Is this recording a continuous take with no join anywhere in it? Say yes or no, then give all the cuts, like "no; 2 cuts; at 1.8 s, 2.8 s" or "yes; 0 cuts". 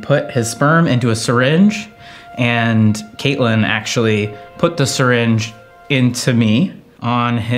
yes; 0 cuts